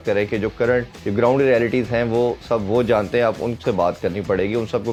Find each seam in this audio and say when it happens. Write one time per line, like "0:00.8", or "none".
none